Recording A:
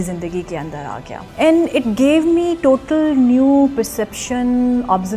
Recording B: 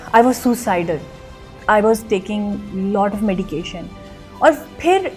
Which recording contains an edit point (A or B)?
A